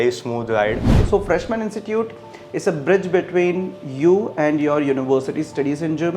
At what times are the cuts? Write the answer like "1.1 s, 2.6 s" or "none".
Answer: 0.9 s